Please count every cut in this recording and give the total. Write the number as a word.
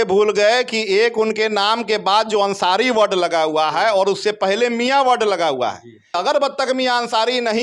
one